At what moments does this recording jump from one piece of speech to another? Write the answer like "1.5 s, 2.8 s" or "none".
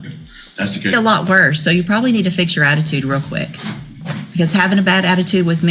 0.9 s